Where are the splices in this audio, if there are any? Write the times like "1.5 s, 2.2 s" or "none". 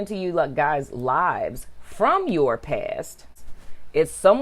3.3 s